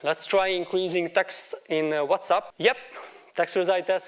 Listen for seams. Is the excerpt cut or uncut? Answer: cut